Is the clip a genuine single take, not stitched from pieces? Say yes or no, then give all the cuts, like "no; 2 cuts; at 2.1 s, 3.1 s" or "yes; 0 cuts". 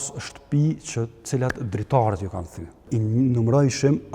no; 1 cut; at 2.9 s